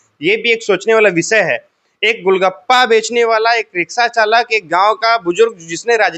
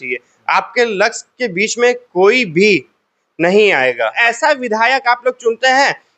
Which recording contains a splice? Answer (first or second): second